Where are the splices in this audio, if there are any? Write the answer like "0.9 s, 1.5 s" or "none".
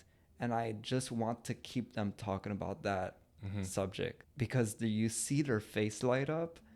4.2 s

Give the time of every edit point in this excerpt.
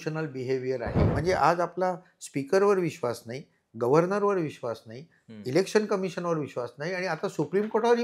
1.1 s

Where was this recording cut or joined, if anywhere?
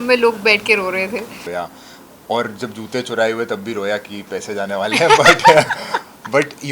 1.5 s

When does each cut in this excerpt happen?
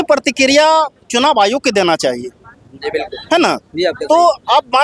none

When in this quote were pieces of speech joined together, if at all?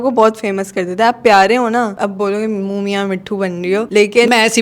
2.0 s

